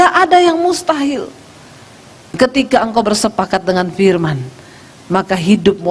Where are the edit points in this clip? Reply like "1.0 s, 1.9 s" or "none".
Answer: 2.3 s